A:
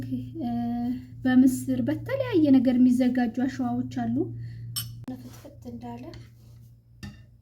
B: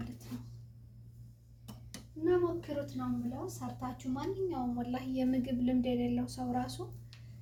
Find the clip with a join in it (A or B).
A